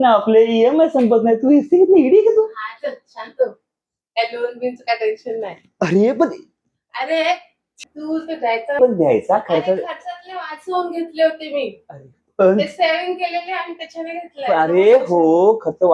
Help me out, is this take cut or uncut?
uncut